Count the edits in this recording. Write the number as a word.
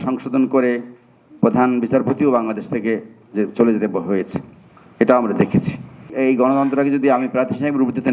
one